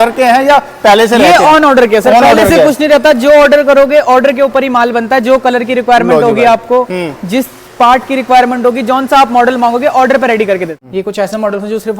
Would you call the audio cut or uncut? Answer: cut